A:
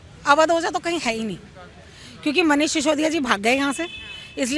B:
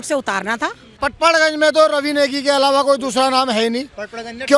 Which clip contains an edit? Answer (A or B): B